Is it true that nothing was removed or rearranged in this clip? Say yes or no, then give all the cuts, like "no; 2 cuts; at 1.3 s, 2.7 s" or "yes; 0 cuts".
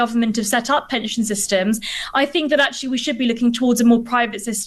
yes; 0 cuts